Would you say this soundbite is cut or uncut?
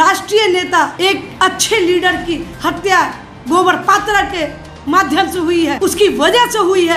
cut